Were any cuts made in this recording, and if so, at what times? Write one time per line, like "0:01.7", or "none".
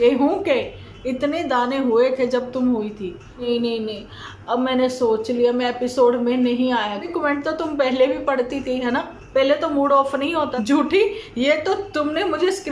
0:03.5
0:07.1
0:10.5